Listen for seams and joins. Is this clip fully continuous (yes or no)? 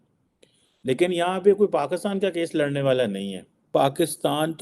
no